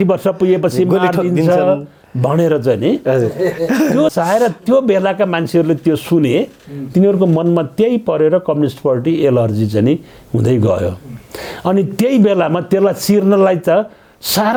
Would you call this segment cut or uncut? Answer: uncut